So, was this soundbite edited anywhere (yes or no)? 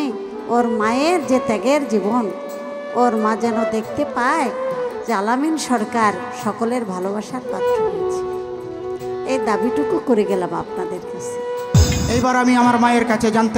yes